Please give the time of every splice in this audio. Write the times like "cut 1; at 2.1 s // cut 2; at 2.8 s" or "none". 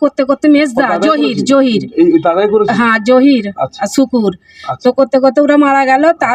none